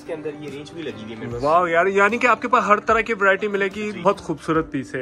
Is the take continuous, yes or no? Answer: no